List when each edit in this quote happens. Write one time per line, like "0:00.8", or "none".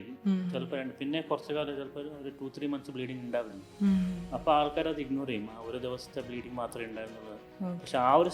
none